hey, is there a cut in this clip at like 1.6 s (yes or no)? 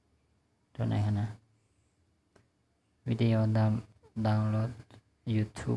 yes